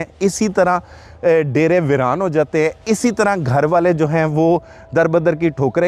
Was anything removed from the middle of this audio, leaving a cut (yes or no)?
no